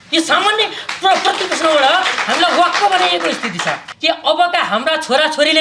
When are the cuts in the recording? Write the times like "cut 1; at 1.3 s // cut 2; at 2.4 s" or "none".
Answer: cut 1; at 3.9 s